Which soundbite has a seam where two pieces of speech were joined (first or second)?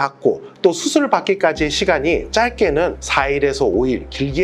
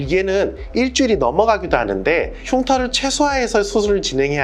second